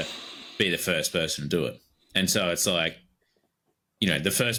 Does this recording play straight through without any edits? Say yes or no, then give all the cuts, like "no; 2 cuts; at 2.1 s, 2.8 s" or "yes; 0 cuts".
yes; 0 cuts